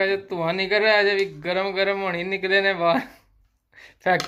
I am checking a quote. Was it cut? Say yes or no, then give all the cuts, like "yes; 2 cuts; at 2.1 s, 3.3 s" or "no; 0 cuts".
no; 0 cuts